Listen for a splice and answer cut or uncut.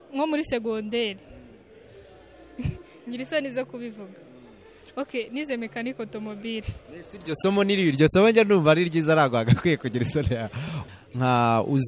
cut